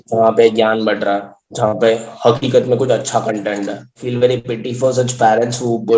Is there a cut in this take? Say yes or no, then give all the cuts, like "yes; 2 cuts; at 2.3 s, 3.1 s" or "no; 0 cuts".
yes; 1 cut; at 4.1 s